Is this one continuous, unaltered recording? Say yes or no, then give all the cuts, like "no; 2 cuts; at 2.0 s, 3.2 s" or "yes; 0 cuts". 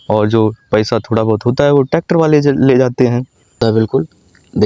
no; 1 cut; at 3.6 s